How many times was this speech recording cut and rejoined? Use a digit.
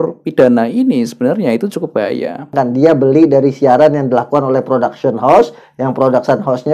1